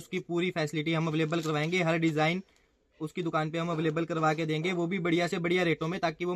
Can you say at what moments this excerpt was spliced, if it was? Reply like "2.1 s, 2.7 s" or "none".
none